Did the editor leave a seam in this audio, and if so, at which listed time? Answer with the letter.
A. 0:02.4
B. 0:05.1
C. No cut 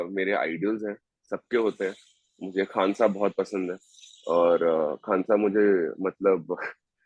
C